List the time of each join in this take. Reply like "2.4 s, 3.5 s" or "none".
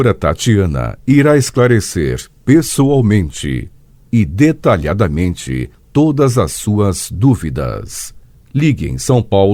none